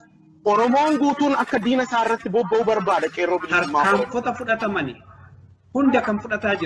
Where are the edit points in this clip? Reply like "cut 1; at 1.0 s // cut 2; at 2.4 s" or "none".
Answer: cut 1; at 3.9 s